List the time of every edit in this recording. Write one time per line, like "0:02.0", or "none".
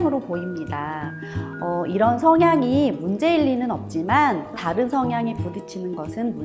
0:04.6